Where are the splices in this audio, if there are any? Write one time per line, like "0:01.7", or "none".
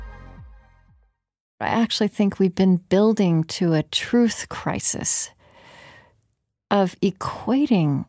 0:01.6